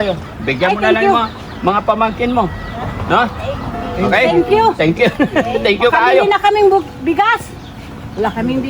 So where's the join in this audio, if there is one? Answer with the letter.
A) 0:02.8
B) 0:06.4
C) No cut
C